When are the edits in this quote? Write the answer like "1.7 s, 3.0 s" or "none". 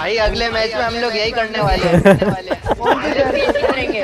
none